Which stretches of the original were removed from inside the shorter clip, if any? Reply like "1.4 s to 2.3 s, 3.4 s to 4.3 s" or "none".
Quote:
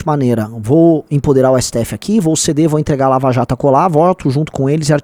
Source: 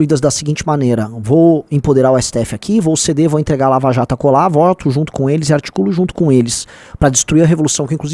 none